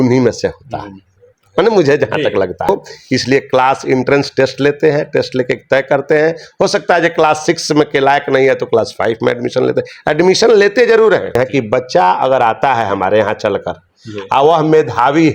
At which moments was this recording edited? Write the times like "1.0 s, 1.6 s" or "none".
2.7 s, 11.4 s